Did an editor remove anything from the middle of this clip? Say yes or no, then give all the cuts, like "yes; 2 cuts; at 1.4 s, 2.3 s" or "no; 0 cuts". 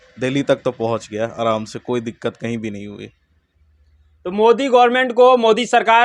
no; 0 cuts